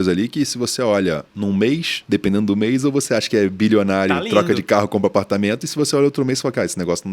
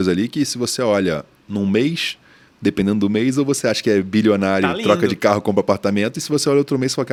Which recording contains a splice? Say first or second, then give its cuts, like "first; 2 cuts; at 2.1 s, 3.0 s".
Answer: first; 2 cuts; at 1.3 s, 1.9 s